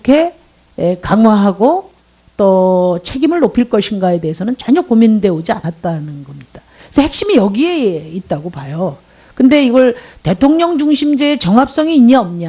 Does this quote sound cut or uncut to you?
cut